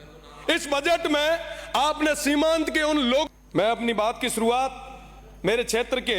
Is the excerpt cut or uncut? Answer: cut